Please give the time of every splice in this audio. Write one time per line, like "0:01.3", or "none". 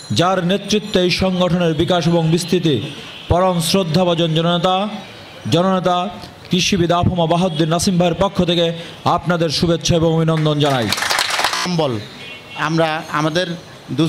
0:11.7